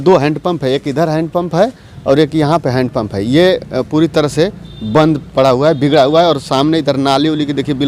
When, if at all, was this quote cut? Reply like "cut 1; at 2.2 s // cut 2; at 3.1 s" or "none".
none